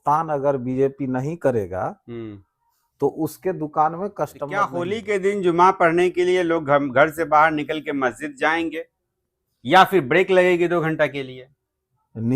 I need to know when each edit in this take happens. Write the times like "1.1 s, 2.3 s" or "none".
4.7 s